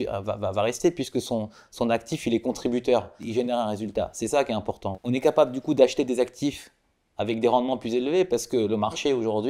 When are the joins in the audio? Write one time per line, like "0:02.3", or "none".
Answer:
0:03.2
0:04.8